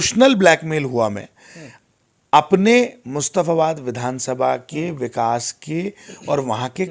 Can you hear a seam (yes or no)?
no